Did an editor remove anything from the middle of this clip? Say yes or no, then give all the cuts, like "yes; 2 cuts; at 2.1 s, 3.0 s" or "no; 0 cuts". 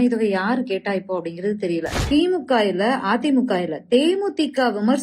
yes; 1 cut; at 2.0 s